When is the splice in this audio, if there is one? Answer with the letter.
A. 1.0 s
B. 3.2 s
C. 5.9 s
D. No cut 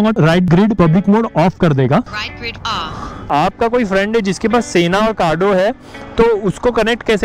B